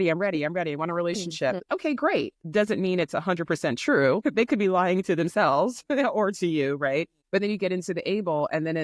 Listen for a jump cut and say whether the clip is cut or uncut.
cut